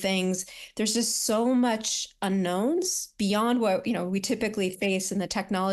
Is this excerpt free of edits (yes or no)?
yes